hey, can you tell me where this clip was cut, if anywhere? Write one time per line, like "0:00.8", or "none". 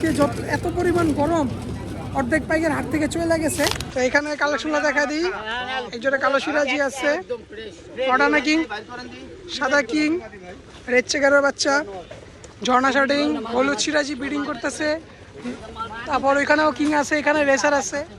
0:03.8